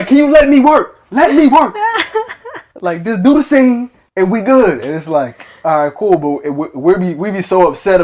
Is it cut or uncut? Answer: uncut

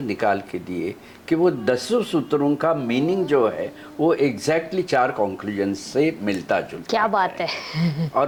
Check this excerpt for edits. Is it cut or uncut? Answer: uncut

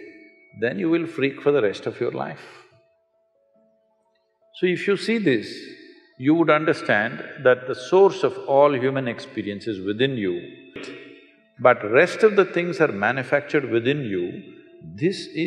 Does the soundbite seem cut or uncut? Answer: cut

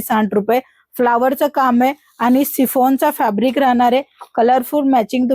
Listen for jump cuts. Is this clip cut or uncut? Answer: uncut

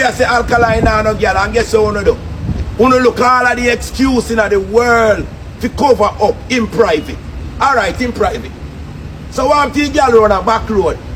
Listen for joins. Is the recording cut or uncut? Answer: uncut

